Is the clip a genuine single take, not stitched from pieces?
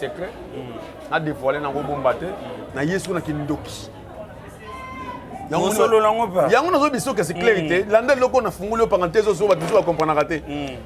no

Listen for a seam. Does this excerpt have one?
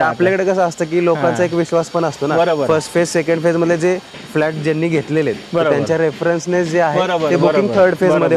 no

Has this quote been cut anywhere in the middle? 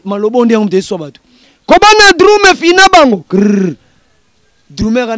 yes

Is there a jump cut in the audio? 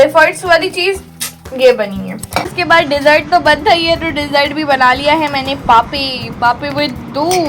yes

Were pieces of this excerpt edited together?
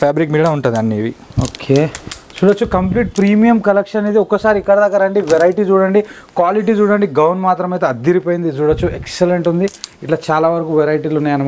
no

